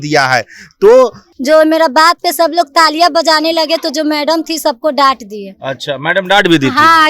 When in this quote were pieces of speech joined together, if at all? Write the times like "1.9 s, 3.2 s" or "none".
1.3 s